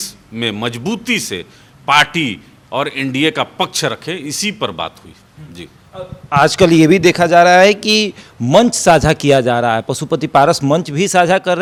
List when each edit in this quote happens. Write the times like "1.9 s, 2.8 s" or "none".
none